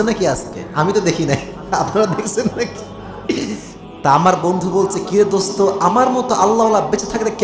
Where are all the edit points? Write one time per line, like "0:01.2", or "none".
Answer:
0:03.8

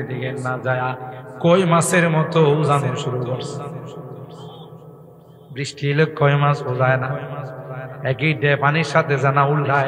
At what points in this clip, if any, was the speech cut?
none

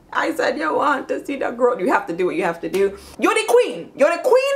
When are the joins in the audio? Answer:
0:01.8
0:03.0

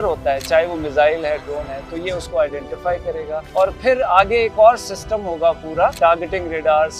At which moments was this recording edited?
0:03.4
0:05.9

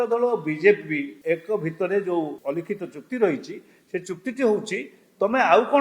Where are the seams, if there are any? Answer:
0:01.1
0:02.4

